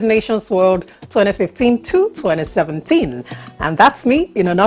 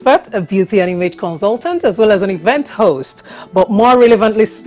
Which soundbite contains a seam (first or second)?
first